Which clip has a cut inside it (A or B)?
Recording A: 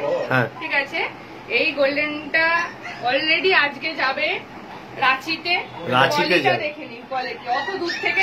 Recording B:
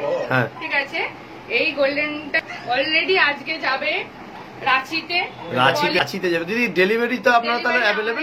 B